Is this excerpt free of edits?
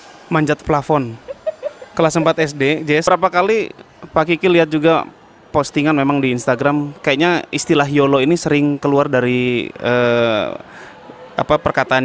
no; 1 cut; at 3.1 s

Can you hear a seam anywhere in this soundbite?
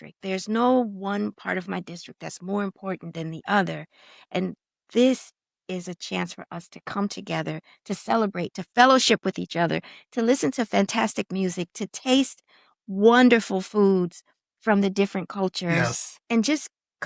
no; 0 cuts

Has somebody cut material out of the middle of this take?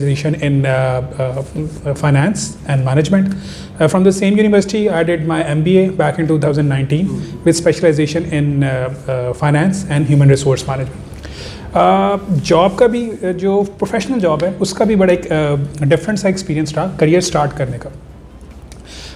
no; 0 cuts

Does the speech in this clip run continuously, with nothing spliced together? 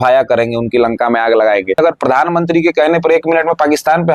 no; 1 cut; at 1.8 s

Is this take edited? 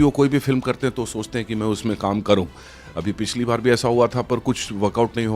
no; 0 cuts

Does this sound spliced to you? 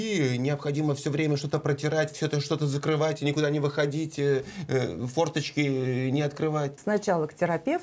yes; 1 cut; at 6.8 s

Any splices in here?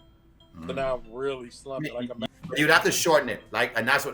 yes; 1 cut; at 2.2 s

